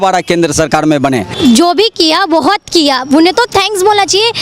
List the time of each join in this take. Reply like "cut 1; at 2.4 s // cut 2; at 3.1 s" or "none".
cut 1; at 1.3 s